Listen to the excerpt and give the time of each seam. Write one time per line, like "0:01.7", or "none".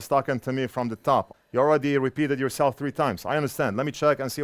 0:01.3